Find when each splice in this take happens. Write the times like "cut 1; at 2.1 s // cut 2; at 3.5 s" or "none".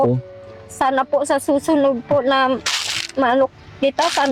none